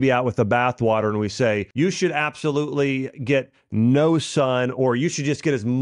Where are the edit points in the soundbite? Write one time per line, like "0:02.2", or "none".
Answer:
0:01.7